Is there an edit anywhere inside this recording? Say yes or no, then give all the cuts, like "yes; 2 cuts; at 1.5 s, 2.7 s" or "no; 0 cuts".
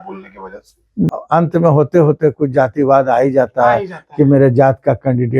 yes; 1 cut; at 1.1 s